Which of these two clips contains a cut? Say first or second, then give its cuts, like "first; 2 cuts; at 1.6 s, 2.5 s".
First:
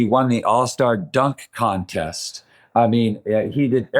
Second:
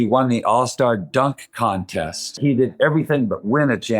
second; 1 cut; at 2.4 s